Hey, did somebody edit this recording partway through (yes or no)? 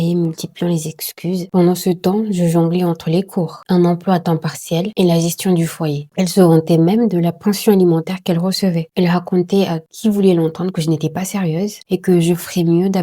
yes